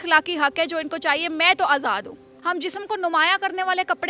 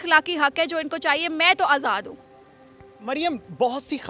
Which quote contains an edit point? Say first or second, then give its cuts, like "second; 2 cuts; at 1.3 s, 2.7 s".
first; 1 cut; at 2.3 s